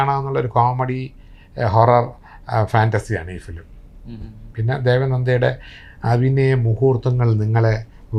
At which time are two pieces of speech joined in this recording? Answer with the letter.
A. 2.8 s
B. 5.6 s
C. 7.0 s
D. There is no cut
D